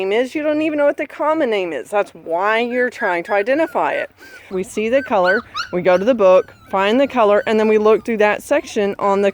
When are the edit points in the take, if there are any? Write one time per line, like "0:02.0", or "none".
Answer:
0:04.5